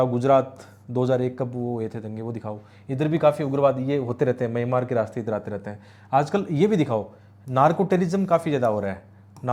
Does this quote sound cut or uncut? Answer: uncut